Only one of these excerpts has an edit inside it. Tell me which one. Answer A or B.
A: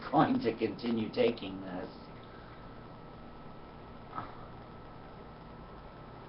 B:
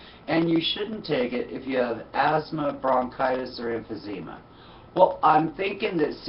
B